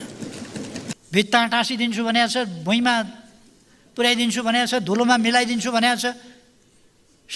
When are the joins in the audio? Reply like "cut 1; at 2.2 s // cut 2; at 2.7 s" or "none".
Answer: cut 1; at 1.0 s